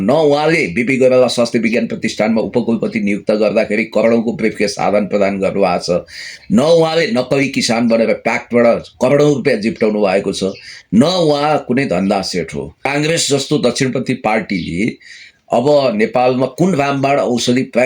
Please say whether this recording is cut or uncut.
cut